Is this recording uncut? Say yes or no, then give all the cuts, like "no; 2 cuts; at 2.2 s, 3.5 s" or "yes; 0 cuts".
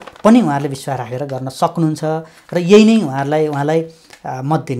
yes; 0 cuts